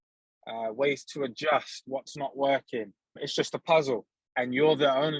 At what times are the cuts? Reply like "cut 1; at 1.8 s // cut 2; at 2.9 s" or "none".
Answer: cut 1; at 3.2 s // cut 2; at 4.2 s